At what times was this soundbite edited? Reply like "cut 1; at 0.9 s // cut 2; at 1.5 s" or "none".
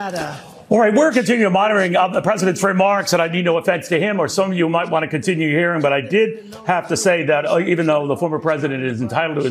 none